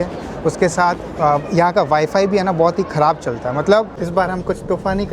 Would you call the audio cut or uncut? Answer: cut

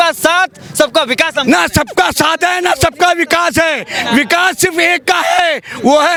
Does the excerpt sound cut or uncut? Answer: uncut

